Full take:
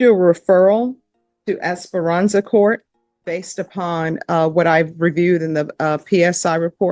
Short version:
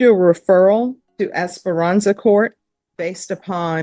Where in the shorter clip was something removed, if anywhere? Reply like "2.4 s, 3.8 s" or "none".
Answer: 1.0 s